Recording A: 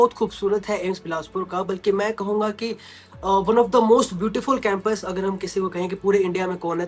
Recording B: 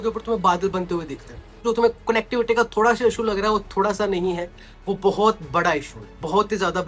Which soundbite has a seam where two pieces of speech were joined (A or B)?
B